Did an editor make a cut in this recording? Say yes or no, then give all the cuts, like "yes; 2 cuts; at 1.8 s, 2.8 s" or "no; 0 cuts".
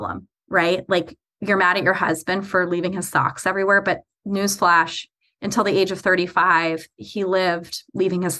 no; 0 cuts